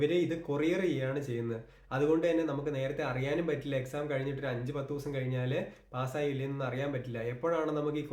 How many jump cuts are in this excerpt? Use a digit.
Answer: 0